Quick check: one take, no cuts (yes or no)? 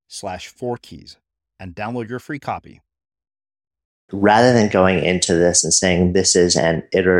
no